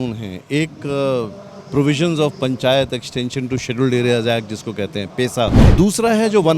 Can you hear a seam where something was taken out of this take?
yes; 1 cut; at 5.6 s

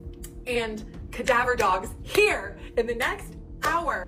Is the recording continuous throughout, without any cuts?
yes; 0 cuts

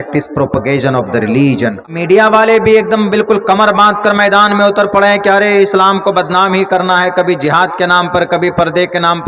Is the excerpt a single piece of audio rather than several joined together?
no; 1 cut; at 1.9 s

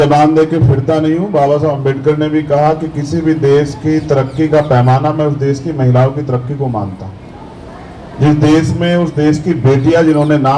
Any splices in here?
no; 0 cuts

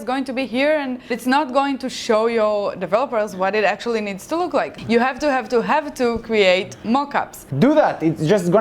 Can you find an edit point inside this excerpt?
yes; 3 cuts; at 1.2 s, 4.8 s, 7.4 s

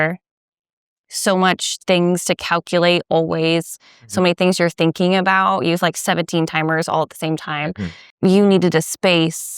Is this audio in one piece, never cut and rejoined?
no; 1 cut; at 8.0 s

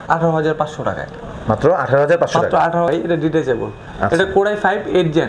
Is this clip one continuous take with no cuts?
no; 1 cut; at 2.9 s

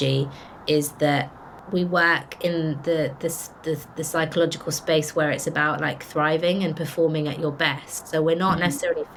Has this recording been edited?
no; 0 cuts

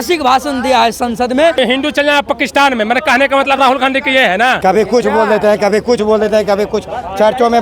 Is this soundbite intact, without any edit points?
no; 2 cuts; at 1.6 s, 4.6 s

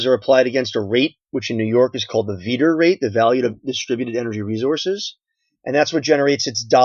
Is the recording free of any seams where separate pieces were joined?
yes; 0 cuts

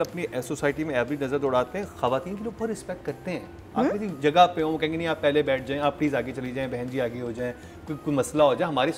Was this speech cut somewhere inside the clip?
no; 0 cuts

